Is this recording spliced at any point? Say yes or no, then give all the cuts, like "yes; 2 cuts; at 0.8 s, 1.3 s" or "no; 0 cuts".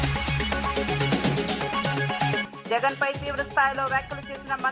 yes; 1 cut; at 2.5 s